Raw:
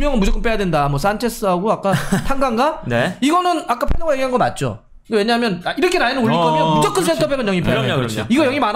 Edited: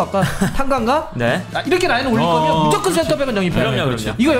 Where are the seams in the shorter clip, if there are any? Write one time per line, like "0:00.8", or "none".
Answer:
0:01.4